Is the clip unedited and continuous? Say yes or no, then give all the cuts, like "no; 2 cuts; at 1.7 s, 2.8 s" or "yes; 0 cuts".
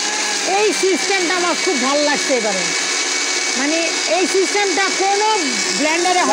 yes; 0 cuts